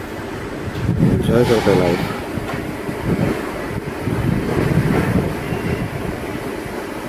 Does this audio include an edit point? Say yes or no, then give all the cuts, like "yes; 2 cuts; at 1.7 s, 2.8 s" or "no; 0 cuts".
no; 0 cuts